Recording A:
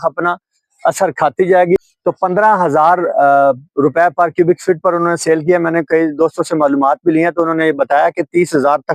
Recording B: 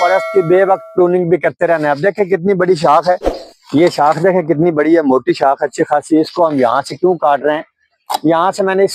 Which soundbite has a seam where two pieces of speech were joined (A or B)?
A